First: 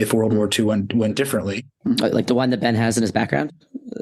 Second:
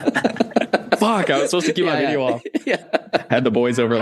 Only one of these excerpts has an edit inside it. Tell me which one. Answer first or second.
second